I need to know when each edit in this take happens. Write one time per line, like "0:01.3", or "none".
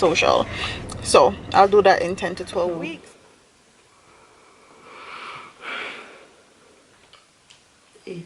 0:02.7